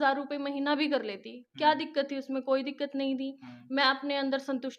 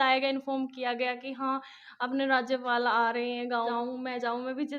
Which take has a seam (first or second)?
second